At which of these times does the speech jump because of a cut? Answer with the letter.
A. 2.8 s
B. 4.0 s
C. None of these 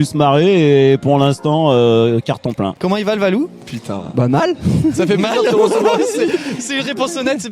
A